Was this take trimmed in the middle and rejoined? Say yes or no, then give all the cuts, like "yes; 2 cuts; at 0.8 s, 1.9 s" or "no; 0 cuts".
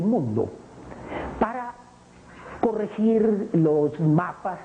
yes; 1 cut; at 3.5 s